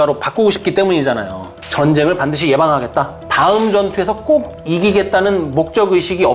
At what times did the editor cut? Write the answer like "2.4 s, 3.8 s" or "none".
1.5 s